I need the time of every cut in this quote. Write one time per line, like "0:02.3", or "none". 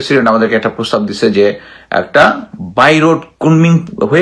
none